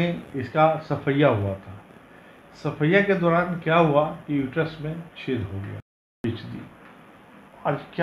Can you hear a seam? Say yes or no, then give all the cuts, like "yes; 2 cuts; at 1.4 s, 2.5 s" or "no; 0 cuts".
yes; 1 cut; at 6.2 s